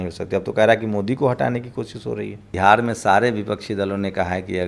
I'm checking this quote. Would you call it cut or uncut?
cut